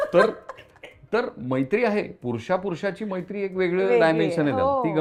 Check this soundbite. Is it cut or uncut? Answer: uncut